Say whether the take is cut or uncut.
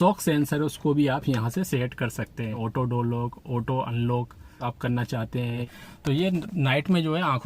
cut